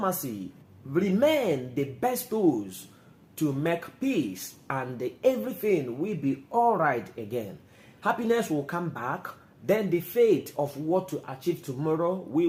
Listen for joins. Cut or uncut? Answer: uncut